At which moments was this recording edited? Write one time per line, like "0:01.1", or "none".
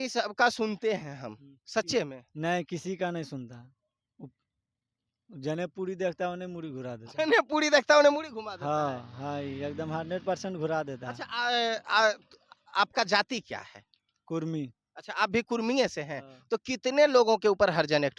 none